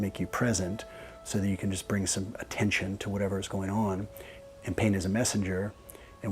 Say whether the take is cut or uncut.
uncut